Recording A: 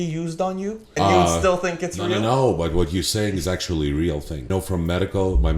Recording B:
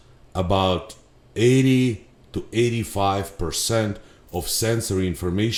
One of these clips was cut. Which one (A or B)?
A